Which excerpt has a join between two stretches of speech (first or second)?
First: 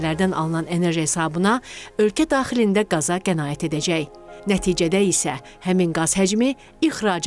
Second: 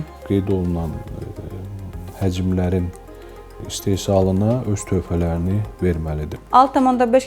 second